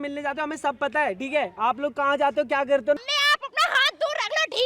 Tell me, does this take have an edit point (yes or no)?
yes